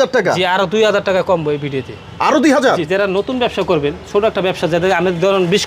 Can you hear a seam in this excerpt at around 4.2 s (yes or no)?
no